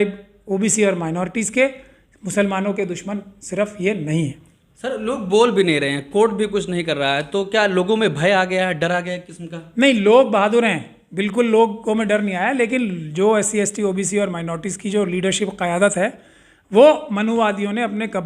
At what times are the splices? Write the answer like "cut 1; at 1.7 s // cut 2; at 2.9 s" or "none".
none